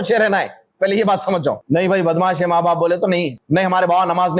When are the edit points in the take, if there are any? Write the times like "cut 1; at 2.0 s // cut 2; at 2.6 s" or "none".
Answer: cut 1; at 1.6 s // cut 2; at 3.3 s